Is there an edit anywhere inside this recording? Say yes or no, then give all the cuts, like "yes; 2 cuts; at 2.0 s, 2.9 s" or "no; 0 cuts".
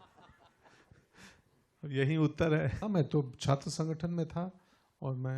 yes; 1 cut; at 2.8 s